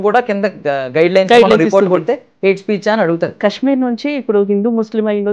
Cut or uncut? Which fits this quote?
cut